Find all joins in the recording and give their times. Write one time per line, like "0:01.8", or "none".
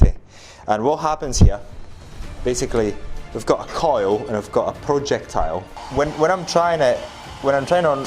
0:05.8